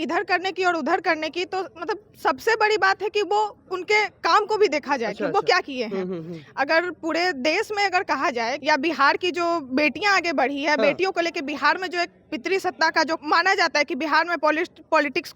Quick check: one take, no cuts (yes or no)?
no